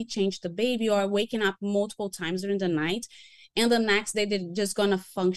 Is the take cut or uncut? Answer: uncut